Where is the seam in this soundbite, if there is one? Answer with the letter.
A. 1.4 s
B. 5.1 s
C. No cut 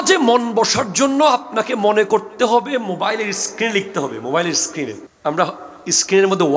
B